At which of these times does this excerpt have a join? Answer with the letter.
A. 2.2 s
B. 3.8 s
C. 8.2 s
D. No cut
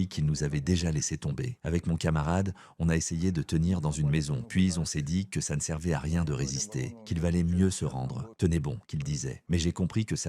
C